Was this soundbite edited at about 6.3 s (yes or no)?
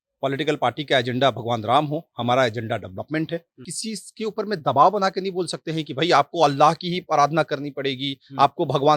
no